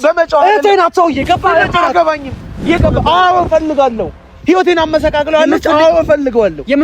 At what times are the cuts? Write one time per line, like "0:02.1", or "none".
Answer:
0:02.8